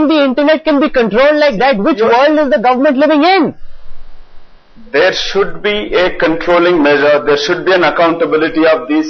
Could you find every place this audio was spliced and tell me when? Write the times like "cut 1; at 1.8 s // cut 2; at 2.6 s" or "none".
none